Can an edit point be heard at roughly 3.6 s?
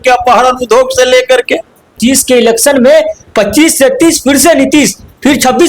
no; 1 cut; at 2.0 s

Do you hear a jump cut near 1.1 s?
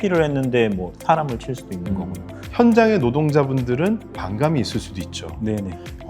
no; 2 cuts; at 2.4 s, 4.1 s

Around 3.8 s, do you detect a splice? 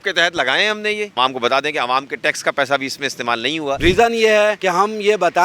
yes; 2 cuts; at 1.1 s, 3.8 s

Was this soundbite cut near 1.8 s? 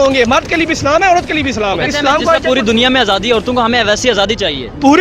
yes; 1 cut; at 1.8 s

